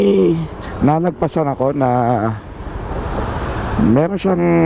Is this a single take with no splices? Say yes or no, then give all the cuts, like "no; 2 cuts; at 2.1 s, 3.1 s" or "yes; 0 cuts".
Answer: yes; 0 cuts